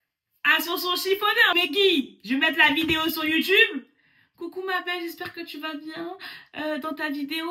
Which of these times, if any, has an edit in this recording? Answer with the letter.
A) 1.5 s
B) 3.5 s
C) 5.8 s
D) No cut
A